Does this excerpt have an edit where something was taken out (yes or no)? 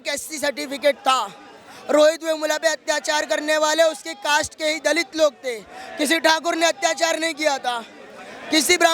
no